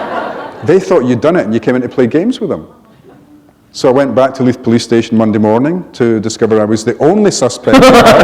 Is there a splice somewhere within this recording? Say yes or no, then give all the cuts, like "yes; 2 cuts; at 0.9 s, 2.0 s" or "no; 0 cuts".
no; 0 cuts